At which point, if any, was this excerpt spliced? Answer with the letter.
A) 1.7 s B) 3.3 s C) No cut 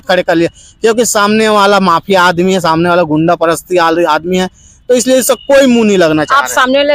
C